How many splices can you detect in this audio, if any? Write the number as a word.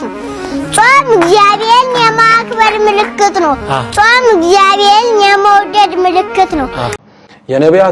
one